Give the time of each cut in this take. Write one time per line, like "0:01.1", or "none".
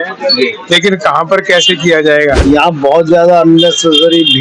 0:02.4